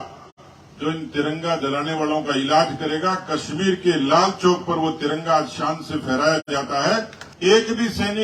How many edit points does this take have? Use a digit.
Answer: 1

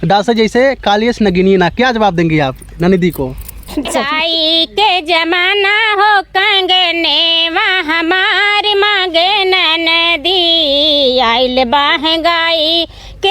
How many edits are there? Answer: 1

